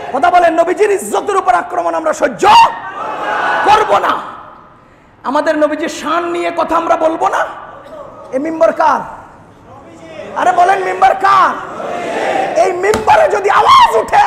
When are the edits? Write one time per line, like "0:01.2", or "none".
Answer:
none